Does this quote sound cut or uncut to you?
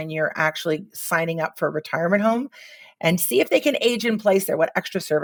uncut